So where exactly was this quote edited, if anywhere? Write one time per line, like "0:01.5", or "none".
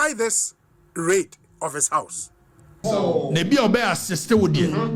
0:02.7

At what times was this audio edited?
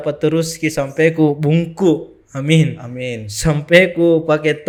none

